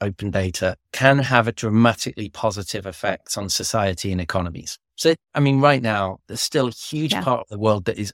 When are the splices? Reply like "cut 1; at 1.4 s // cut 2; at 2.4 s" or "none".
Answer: none